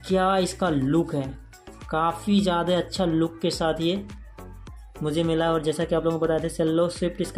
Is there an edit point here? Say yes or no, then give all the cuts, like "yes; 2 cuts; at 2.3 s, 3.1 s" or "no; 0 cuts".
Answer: no; 0 cuts